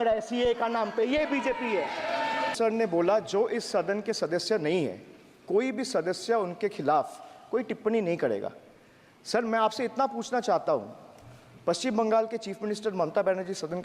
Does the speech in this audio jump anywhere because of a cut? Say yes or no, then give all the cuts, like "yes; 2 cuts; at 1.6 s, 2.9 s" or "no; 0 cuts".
yes; 1 cut; at 2.5 s